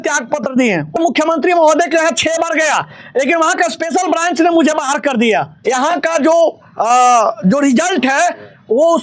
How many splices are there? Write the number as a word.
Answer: two